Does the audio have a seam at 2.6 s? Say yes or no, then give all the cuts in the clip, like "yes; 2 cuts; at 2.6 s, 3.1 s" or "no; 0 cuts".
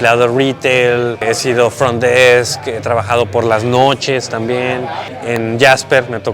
no; 2 cuts; at 1.2 s, 5.1 s